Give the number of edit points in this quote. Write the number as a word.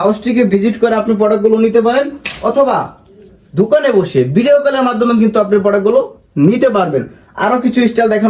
zero